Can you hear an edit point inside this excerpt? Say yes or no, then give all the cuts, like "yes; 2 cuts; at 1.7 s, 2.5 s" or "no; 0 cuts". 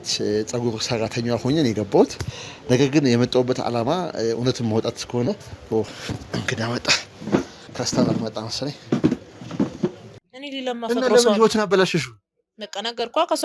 yes; 1 cut; at 10.0 s